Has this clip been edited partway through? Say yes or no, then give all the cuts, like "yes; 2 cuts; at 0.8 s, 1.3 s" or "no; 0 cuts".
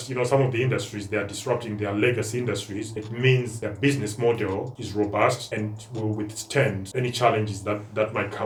no; 0 cuts